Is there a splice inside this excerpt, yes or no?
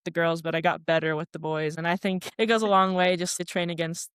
yes